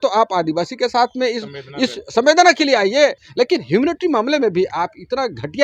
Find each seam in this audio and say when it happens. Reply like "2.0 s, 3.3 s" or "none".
3.2 s